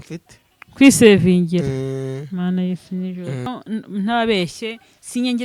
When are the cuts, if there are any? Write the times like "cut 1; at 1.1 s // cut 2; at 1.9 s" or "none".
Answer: cut 1; at 3.5 s

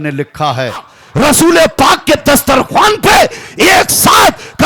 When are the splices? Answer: cut 1; at 1.0 s

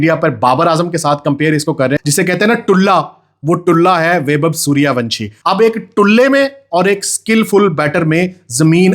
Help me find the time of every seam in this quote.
cut 1; at 2.0 s // cut 2; at 5.3 s

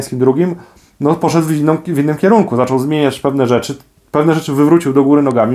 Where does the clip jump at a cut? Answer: none

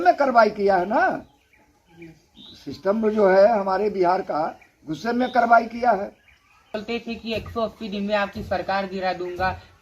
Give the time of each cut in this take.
cut 1; at 6.8 s

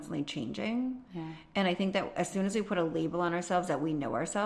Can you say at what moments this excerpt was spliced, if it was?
none

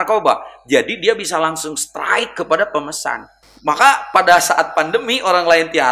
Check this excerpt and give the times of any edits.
cut 1; at 3.4 s

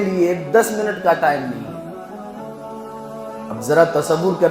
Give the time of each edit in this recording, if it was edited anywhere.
none

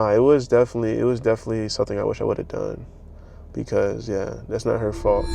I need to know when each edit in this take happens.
none

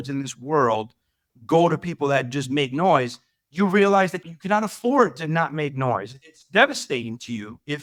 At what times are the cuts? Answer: none

